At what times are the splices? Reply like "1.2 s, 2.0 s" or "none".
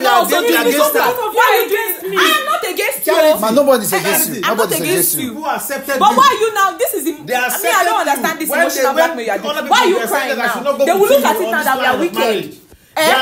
none

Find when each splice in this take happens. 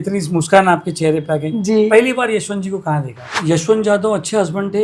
3.3 s

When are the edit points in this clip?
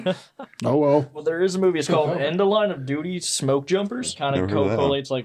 1.1 s, 4.2 s

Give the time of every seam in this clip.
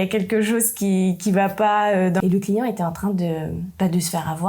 2.2 s

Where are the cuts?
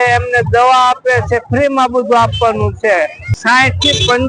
3.4 s

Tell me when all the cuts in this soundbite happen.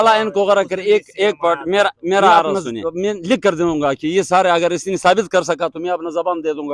2.6 s

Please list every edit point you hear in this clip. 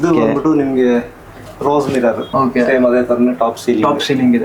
2.2 s

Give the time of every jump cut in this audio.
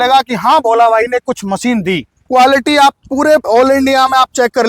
2.2 s

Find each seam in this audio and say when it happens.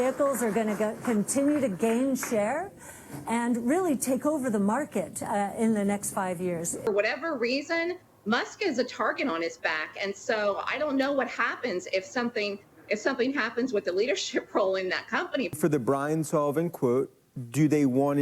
6.9 s, 15.5 s

